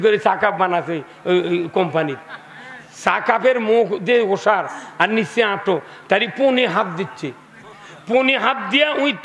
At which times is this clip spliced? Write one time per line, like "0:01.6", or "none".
none